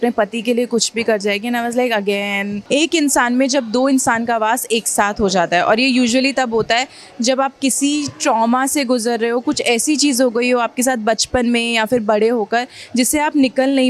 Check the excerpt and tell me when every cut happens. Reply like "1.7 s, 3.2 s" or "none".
2.5 s